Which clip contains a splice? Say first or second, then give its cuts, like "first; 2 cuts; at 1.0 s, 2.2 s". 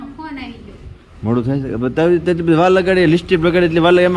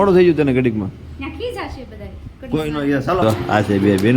second; 1 cut; at 3.2 s